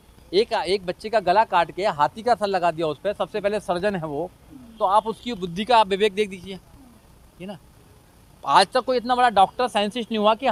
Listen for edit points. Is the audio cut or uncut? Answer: uncut